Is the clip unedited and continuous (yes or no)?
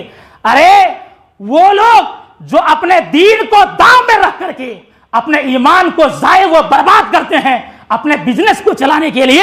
yes